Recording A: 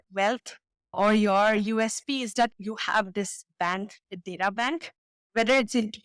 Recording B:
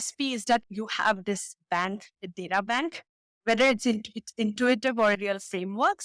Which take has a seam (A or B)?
B